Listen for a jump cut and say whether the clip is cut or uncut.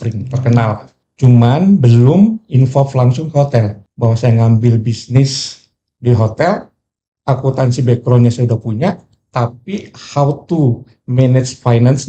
cut